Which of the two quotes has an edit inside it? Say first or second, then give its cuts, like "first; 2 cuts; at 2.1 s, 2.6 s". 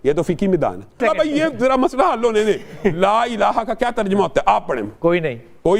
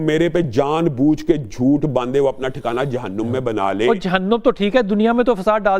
first; 1 cut; at 1.0 s